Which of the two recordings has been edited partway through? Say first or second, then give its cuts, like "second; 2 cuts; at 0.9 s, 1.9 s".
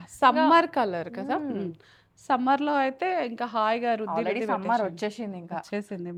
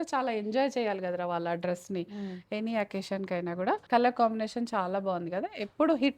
second; 1 cut; at 3.8 s